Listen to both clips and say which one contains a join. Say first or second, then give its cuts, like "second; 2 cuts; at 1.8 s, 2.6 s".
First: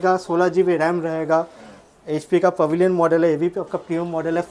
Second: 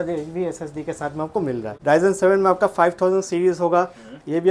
second; 1 cut; at 1.7 s